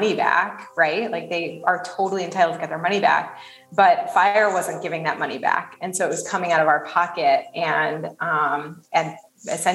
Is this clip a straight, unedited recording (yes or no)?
yes